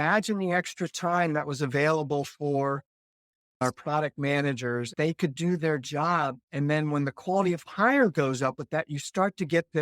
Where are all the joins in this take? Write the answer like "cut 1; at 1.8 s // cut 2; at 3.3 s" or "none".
cut 1; at 3.6 s // cut 2; at 4.9 s // cut 3; at 6.4 s